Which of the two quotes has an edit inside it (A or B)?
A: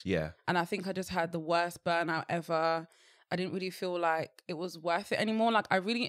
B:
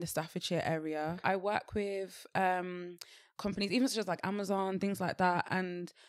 B